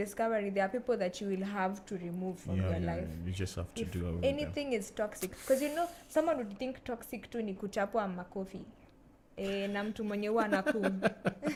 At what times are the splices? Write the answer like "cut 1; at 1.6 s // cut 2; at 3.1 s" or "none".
none

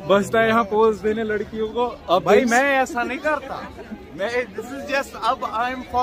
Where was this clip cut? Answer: none

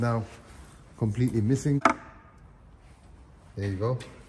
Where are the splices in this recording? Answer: cut 1; at 1.8 s

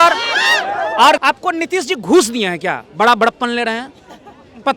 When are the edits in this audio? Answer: cut 1; at 1.2 s

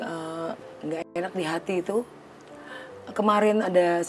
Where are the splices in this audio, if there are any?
none

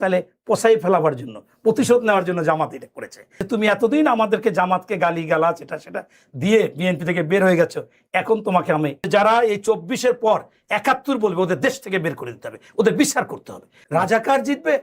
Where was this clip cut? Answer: cut 1; at 3.3 s // cut 2; at 9.1 s // cut 3; at 13.7 s

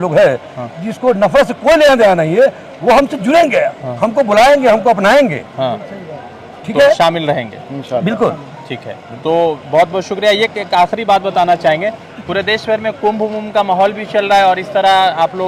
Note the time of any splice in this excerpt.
none

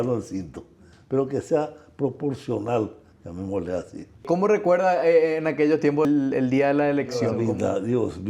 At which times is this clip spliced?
cut 1; at 4.2 s // cut 2; at 6.1 s // cut 3; at 7.3 s

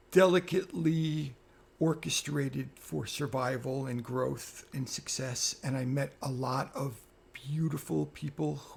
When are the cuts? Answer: none

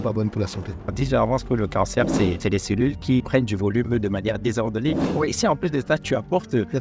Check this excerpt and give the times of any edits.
cut 1; at 0.9 s // cut 2; at 2.4 s // cut 3; at 3.2 s

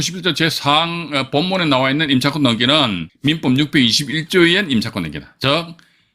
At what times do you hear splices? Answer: cut 1; at 3.1 s

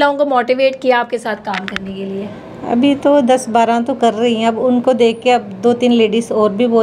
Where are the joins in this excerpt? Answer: none

